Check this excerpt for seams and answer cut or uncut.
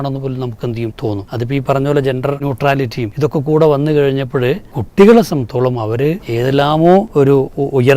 cut